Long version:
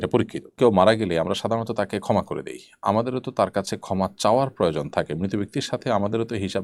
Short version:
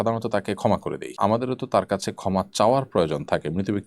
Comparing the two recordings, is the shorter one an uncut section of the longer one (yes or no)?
no